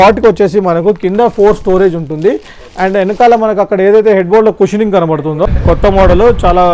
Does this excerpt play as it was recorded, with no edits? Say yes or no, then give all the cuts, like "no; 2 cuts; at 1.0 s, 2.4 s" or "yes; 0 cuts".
no; 1 cut; at 5.5 s